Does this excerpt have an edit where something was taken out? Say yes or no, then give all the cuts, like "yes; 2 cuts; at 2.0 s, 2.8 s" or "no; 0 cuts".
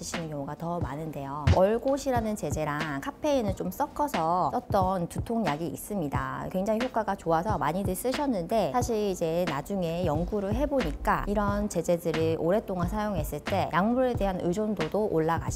yes; 1 cut; at 1.5 s